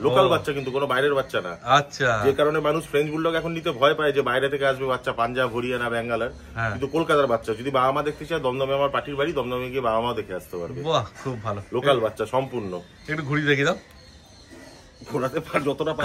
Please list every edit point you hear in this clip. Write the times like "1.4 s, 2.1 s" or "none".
none

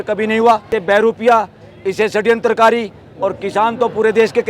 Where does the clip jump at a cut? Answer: 1.0 s

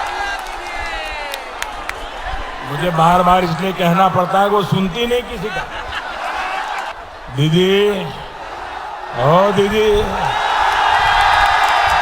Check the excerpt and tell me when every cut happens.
6.9 s

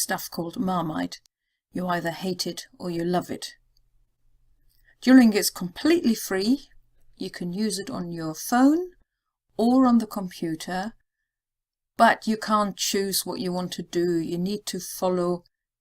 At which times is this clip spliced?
13.3 s

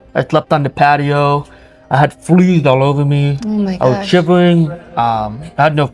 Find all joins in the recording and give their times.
none

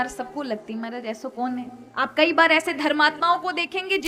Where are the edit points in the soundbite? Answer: 1.8 s

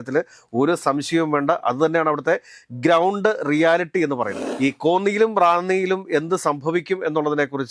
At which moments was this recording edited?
4.4 s

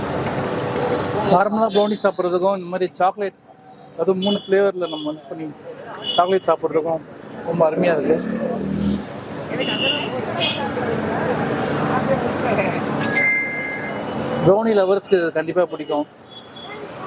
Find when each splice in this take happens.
none

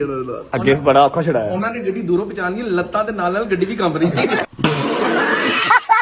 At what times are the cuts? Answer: none

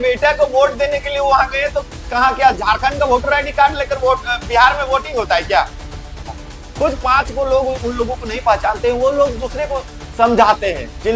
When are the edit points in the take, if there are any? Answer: 6.3 s

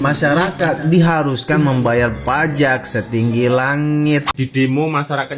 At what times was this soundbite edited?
4.3 s

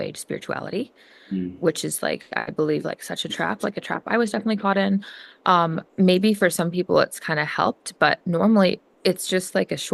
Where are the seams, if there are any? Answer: 5.8 s

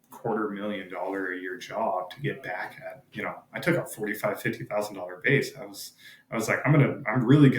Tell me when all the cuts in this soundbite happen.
none

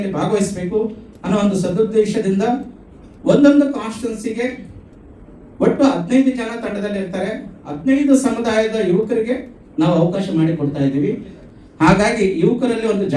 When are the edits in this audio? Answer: 11.4 s

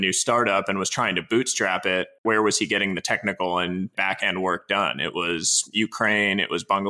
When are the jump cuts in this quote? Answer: 2.2 s, 3.9 s

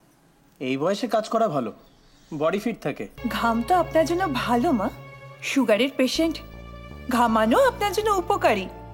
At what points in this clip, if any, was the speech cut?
3.1 s

